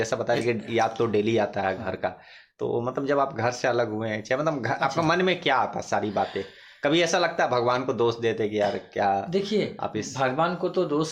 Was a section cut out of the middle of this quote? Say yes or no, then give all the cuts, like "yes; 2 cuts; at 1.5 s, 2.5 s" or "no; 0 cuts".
no; 0 cuts